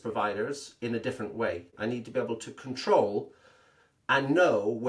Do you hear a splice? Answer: yes; 1 cut; at 1.7 s

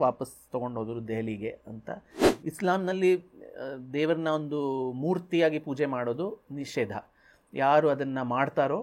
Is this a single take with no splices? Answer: no; 1 cut; at 2.4 s

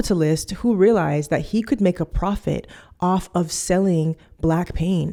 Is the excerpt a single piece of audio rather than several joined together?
yes; 0 cuts

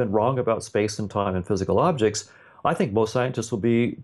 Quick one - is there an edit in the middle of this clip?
no; 0 cuts

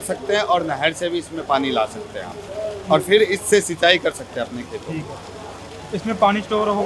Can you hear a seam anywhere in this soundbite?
no; 0 cuts

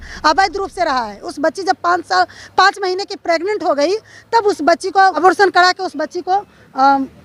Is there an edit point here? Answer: no; 0 cuts

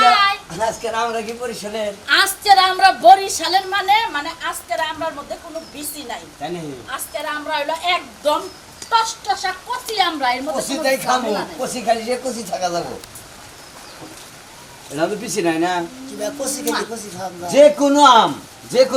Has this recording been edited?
no; 0 cuts

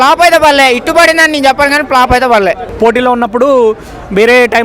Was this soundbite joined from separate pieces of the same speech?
yes; 1 cut; at 2.7 s

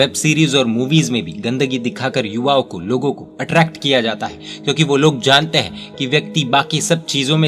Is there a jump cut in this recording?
no; 0 cuts

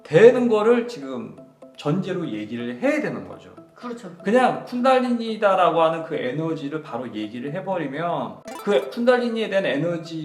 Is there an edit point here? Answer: yes; 1 cut; at 8.5 s

